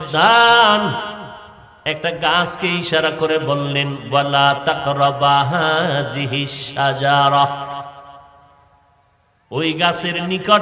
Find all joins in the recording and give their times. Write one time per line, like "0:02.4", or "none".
none

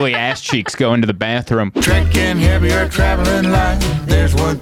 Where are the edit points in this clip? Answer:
0:01.8

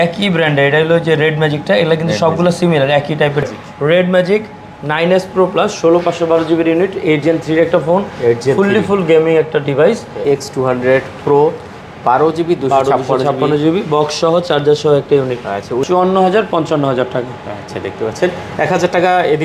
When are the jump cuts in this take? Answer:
0:03.6
0:10.2
0:15.8

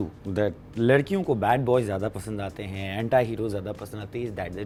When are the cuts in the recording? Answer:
none

